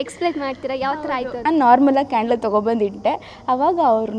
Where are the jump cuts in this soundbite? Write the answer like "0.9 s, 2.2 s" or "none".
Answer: 1.4 s